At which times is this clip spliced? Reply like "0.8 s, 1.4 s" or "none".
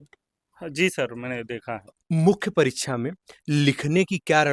1.9 s